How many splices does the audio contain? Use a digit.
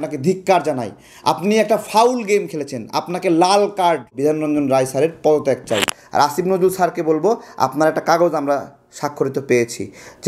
1